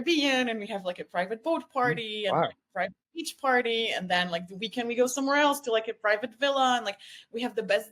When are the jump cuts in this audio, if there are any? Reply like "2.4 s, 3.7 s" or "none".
none